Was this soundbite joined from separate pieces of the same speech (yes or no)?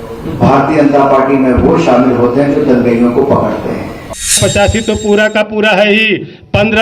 yes